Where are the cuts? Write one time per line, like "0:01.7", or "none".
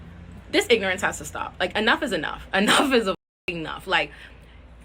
0:02.0